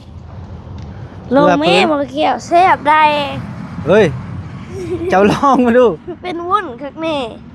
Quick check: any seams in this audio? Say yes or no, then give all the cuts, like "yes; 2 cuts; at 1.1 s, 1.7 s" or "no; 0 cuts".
no; 0 cuts